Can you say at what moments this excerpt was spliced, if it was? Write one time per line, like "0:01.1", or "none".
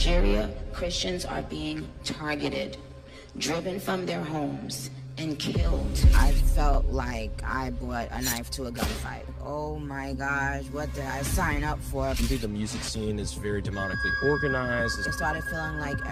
none

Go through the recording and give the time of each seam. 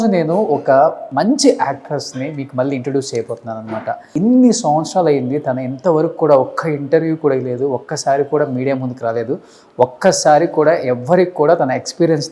0:01.0
0:04.1

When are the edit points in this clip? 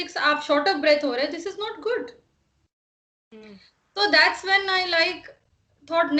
none

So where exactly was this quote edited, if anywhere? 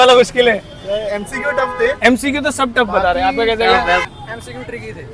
0:04.0

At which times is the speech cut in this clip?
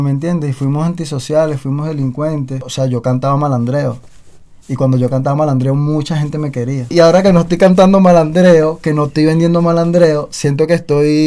0:02.7
0:06.9

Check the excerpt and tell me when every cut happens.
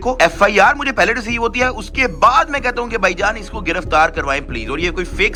none

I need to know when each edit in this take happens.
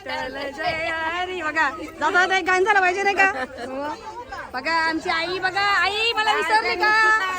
none

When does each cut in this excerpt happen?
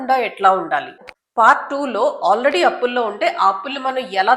0:01.0

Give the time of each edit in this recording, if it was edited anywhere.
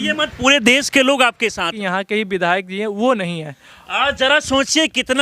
0:01.7

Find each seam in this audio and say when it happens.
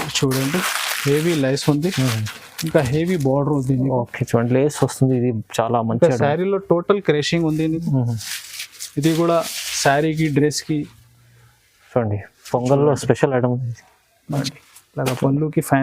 0:14.4

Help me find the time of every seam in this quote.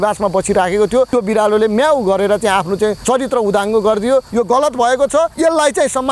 0:01.1
0:03.0
0:04.3
0:05.3

